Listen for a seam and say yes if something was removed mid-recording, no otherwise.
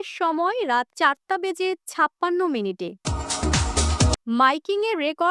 yes